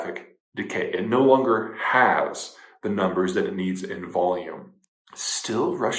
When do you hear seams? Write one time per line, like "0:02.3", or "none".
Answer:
0:04.7